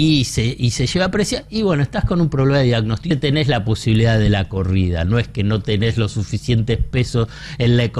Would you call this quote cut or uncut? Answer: cut